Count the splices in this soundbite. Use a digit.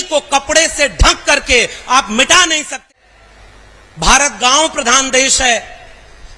1